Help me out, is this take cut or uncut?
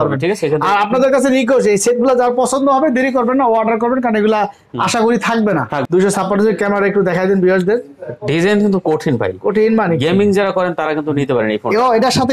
cut